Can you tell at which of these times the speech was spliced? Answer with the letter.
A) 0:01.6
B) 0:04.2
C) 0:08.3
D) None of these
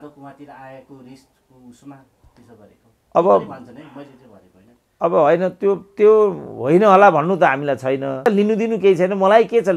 C